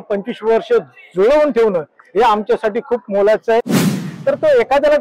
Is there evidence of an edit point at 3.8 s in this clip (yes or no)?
yes